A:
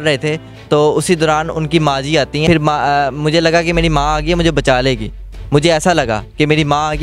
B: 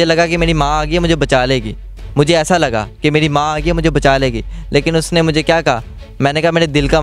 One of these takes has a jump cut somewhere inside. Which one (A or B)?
A